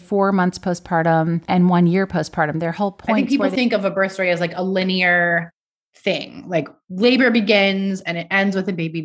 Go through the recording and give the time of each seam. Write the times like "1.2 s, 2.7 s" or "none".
1.4 s, 3.2 s